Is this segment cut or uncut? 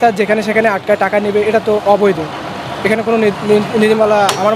uncut